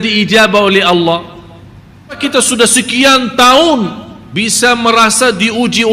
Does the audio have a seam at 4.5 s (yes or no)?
no